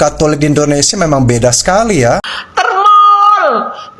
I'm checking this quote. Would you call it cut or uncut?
cut